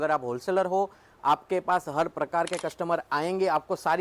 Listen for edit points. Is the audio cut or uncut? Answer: uncut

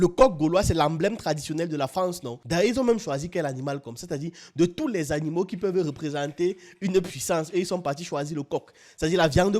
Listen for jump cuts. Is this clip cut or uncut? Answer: uncut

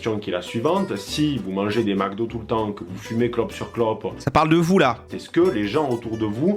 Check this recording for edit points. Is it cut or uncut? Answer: cut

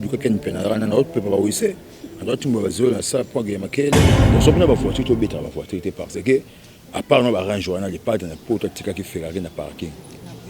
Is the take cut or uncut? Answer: cut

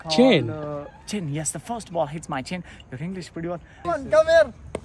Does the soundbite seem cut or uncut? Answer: cut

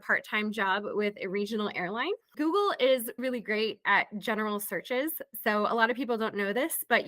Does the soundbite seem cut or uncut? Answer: cut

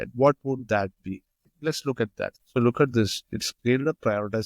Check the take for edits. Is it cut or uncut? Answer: cut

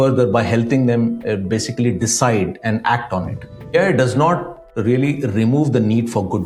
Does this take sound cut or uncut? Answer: cut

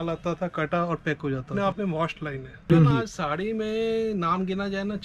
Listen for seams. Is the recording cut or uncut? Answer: cut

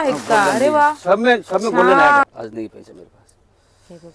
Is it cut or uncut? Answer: cut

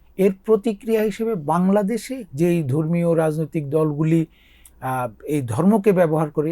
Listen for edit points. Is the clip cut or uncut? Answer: cut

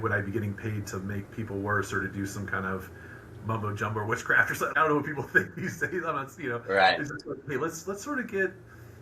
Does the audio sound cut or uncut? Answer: cut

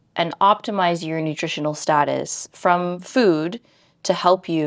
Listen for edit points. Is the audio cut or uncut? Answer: uncut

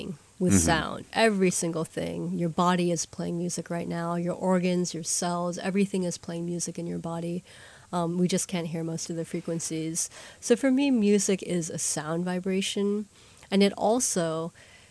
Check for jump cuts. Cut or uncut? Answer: cut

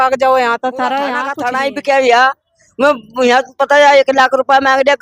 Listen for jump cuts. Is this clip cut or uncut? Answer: cut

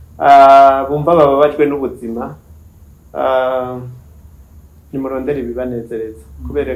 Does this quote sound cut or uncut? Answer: uncut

